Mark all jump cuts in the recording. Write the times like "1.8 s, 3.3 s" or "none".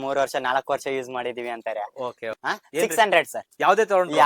2.2 s